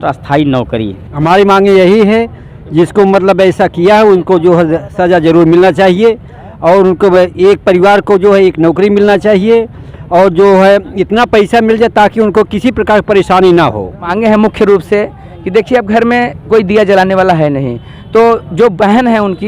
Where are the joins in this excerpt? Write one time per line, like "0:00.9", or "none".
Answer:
0:01.1
0:14.1